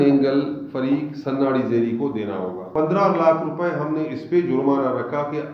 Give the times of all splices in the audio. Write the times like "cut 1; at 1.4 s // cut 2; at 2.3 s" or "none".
cut 1; at 2.7 s